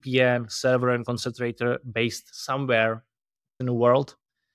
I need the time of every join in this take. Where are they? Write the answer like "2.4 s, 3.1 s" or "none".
3.6 s

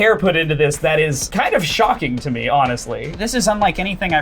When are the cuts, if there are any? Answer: 1.2 s, 3.0 s

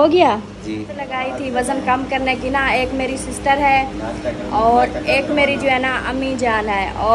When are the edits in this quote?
1.0 s

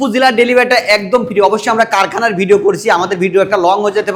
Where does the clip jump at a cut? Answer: none

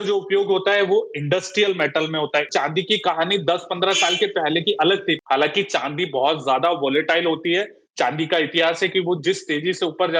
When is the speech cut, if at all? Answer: 2.5 s, 5.2 s

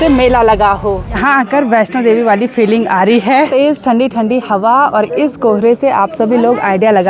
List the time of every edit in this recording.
1.0 s, 3.5 s

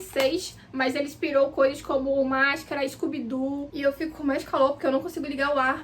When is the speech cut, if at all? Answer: 3.7 s

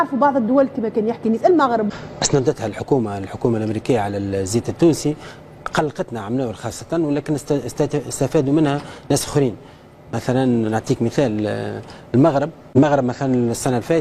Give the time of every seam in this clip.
1.9 s, 12.7 s

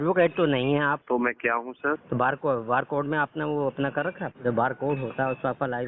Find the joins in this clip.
1.0 s, 2.0 s, 4.3 s

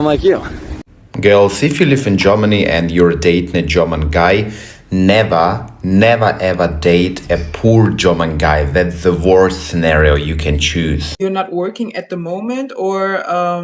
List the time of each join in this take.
1.0 s, 11.1 s

